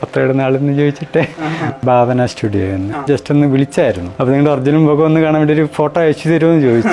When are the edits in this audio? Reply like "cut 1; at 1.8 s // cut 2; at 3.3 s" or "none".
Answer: cut 1; at 1.8 s // cut 2; at 3.0 s // cut 3; at 4.1 s